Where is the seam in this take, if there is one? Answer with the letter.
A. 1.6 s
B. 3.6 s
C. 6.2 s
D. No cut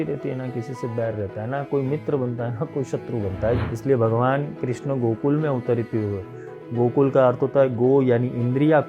B